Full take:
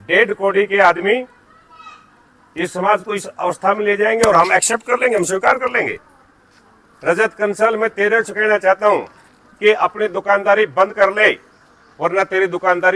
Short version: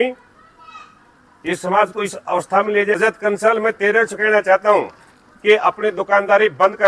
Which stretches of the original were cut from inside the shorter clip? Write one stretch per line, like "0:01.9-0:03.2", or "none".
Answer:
0:04.1-0:07.1